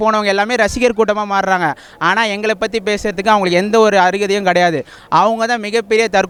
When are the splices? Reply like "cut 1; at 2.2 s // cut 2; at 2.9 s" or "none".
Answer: none